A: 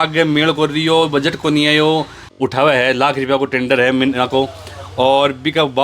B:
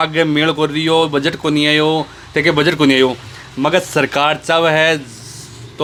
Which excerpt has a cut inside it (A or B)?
A